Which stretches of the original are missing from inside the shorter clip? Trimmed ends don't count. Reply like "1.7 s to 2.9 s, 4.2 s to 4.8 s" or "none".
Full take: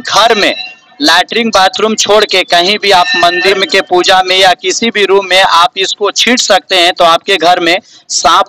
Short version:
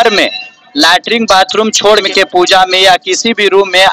2.3 s to 3.6 s